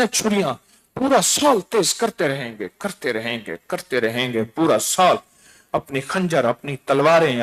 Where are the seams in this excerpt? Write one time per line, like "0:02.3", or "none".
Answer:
none